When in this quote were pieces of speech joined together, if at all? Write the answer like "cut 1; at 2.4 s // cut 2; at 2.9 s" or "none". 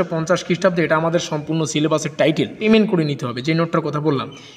cut 1; at 2.6 s